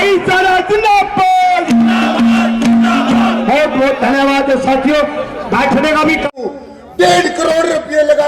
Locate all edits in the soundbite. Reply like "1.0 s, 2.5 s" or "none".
6.5 s